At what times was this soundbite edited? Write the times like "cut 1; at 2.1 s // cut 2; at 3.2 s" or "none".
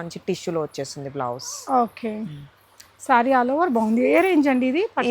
none